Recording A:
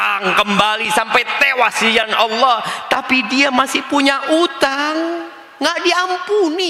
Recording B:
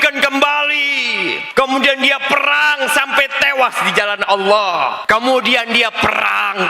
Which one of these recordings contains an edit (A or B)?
B